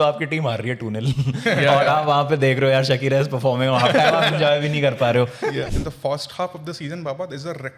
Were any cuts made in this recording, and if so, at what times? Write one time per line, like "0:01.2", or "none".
0:05.7